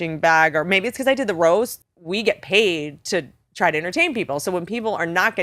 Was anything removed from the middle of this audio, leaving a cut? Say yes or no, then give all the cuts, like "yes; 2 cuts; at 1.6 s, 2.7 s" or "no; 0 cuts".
no; 0 cuts